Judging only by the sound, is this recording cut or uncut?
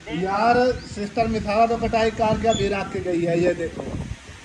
uncut